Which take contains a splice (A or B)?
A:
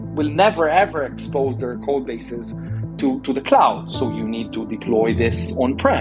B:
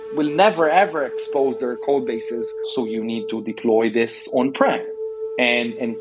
B